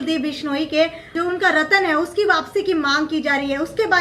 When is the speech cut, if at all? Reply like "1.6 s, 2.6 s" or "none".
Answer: 1.0 s

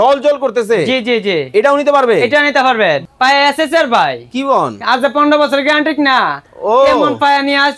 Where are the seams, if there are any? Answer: 3.0 s

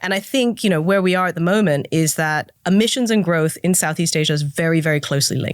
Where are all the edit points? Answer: 2.5 s

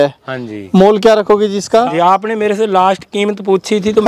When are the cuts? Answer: 1.9 s

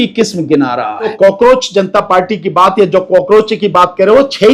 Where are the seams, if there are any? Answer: 1.1 s

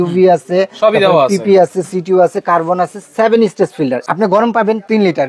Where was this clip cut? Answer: 4.0 s

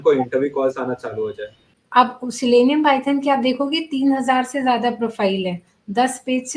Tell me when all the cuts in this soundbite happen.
1.8 s

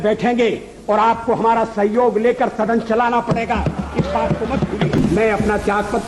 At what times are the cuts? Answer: 5.0 s

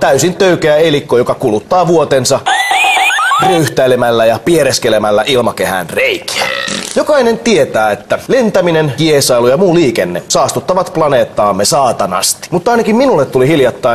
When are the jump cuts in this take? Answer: 8.7 s

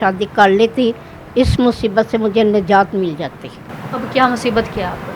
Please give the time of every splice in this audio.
none

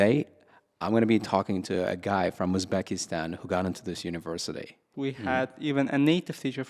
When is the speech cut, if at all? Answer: 4.8 s

